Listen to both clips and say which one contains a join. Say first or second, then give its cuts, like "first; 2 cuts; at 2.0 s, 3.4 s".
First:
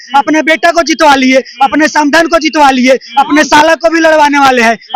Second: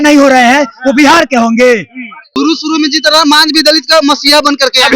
second; 1 cut; at 2.3 s